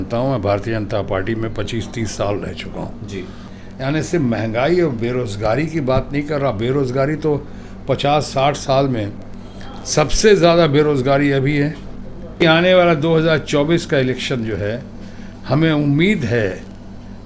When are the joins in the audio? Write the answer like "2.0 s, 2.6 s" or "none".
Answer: 3.4 s, 12.4 s